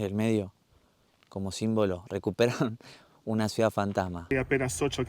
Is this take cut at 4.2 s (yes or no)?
yes